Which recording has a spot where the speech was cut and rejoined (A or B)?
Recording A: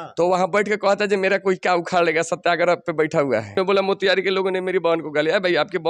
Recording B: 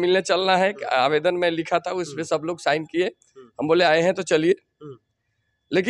A